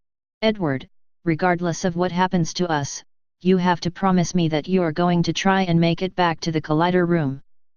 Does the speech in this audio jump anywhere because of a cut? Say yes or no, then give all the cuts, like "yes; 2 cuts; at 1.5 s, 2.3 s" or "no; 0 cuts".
no; 0 cuts